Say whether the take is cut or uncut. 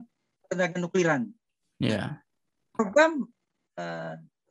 uncut